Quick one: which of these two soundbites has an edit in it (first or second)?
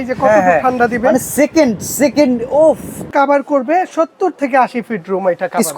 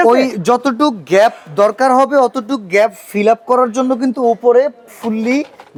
first